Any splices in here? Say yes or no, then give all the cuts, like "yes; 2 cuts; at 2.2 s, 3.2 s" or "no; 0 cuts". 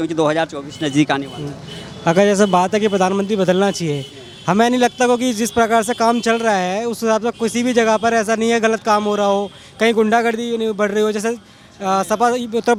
no; 0 cuts